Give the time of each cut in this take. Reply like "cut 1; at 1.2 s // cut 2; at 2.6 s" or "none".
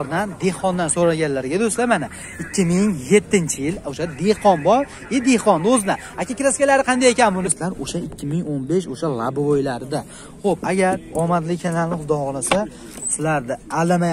cut 1; at 7.5 s